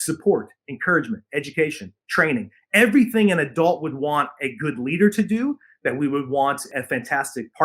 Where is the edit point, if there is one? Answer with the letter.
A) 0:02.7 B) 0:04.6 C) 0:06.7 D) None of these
C